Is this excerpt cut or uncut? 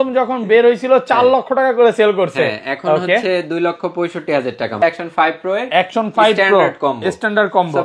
cut